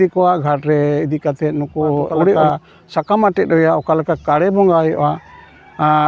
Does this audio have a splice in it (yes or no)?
yes